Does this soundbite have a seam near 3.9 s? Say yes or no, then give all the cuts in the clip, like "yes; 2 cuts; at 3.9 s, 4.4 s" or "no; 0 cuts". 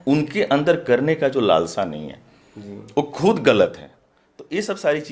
no; 0 cuts